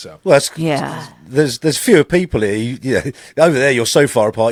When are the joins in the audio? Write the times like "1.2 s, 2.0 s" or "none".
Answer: none